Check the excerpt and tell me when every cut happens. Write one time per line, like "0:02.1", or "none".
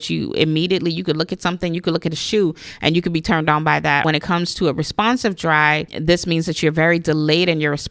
0:04.0
0:05.9